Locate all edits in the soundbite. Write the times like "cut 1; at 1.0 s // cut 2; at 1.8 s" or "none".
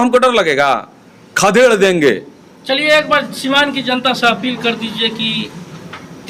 none